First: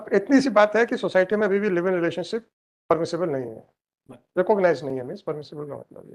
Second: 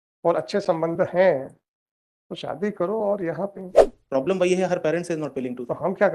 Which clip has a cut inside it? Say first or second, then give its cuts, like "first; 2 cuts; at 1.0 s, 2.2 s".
second; 1 cut; at 3.5 s